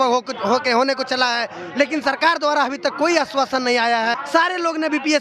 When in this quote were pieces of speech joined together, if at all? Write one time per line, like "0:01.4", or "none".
0:04.2